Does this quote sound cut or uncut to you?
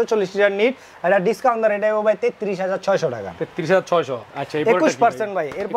uncut